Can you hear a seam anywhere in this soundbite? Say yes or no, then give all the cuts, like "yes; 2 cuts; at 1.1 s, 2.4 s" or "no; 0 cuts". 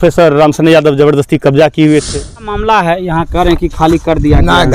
yes; 1 cut; at 2.5 s